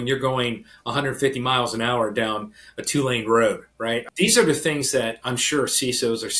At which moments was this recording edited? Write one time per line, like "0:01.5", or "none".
0:04.1